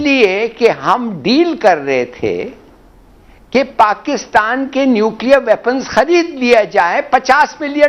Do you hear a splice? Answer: no; 0 cuts

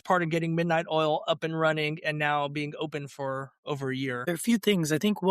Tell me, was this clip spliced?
yes; 1 cut; at 4.2 s

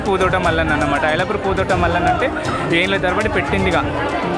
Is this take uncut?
yes; 0 cuts

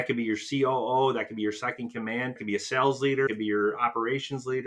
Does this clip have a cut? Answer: yes; 2 cuts; at 2.4 s, 3.3 s

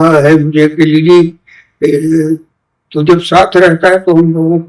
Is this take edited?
no; 0 cuts

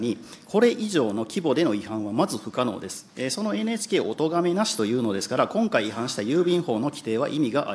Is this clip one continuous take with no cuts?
yes; 0 cuts

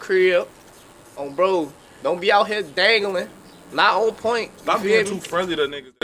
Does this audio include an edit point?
no; 0 cuts

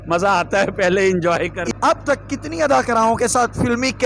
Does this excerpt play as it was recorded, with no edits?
no; 1 cut; at 1.6 s

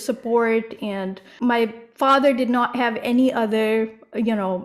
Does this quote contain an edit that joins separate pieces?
yes; 1 cut; at 1.2 s

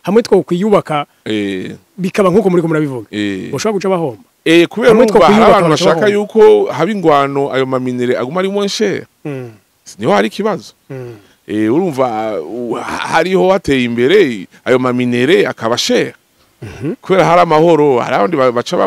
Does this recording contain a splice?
yes; 1 cut; at 4.3 s

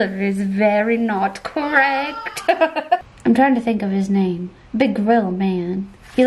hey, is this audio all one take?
no; 1 cut; at 3.1 s

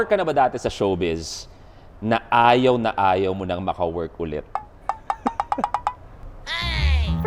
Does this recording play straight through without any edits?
yes; 0 cuts

